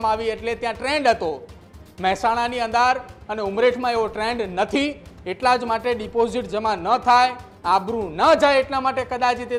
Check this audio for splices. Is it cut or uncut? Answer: uncut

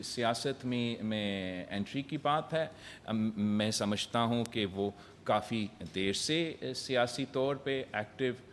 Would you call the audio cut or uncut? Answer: uncut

